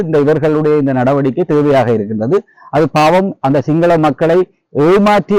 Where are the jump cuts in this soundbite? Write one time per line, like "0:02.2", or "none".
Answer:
none